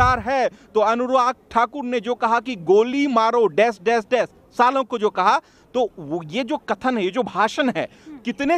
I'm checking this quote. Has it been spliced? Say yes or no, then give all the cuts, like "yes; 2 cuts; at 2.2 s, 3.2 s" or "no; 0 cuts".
no; 0 cuts